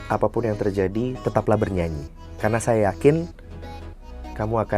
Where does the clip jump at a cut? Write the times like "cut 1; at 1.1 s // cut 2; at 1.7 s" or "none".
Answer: none